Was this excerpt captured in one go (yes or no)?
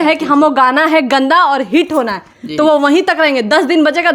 yes